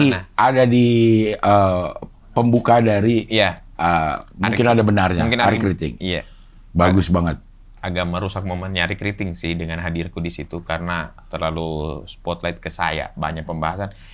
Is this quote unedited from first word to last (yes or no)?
yes